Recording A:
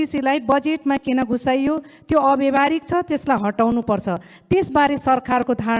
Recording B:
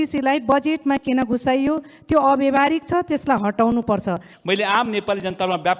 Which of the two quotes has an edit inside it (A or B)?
B